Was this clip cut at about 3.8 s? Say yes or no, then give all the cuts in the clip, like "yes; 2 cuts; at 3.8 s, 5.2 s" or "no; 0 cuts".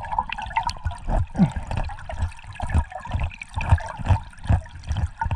no; 0 cuts